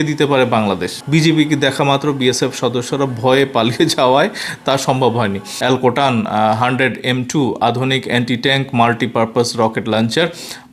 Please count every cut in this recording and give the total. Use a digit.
2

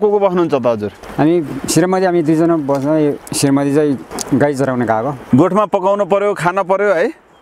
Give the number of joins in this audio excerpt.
4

